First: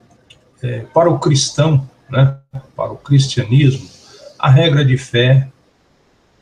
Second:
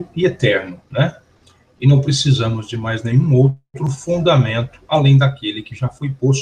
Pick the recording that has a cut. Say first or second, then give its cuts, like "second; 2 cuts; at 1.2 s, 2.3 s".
first; 1 cut; at 4.9 s